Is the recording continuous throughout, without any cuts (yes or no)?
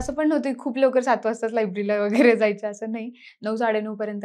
yes